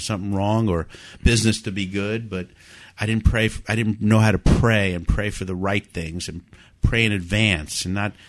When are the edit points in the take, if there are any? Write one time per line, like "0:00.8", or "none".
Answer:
none